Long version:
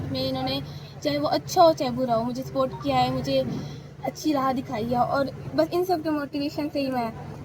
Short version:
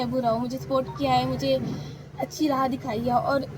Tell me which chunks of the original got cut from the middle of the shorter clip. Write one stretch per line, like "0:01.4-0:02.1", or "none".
none